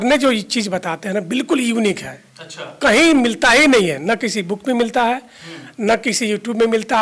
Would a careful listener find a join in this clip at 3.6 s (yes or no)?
no